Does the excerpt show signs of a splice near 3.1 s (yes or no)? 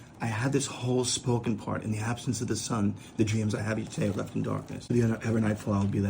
no